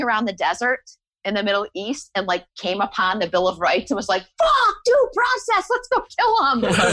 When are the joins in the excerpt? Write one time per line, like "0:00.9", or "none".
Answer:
none